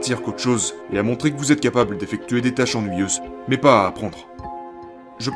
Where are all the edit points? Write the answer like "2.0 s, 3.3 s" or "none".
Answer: 3.3 s, 4.7 s